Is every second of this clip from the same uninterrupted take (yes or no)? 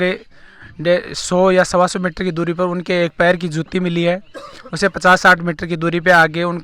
yes